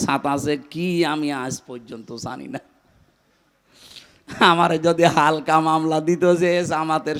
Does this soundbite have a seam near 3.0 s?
no; 0 cuts

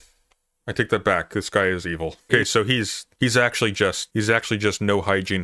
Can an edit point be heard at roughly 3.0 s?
yes; 3 cuts; at 2.3 s, 3.0 s, 4.0 s

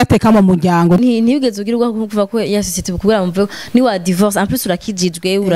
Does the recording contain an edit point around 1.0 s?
yes; 1 cut; at 1.0 s

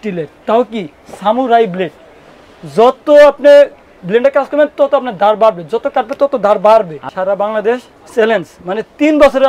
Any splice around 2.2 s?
no; 1 cut; at 7.0 s

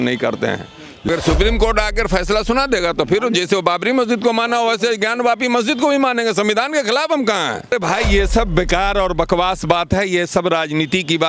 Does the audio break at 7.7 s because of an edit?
yes; 2 cuts; at 1.1 s, 7.7 s

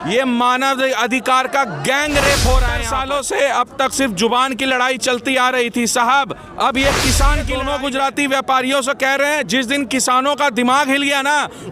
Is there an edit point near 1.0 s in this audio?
no; 2 cuts; at 2.9 s, 7.5 s

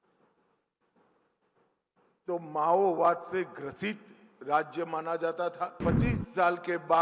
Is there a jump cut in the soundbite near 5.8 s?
yes; 1 cut; at 5.8 s

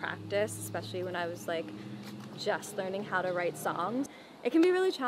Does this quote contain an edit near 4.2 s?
yes; 1 cut; at 4.2 s

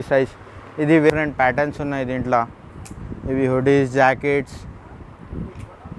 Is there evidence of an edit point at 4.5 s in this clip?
no; 1 cut; at 1.1 s

